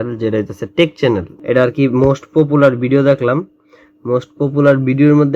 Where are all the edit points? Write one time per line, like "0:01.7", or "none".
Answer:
0:01.3